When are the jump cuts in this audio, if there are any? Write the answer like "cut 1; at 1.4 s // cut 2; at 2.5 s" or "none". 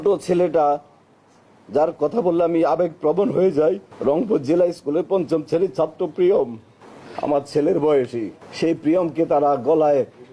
none